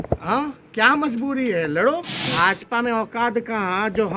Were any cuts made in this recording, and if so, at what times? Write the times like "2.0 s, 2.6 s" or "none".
2.3 s